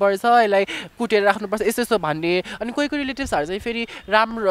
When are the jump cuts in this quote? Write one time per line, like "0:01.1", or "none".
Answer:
none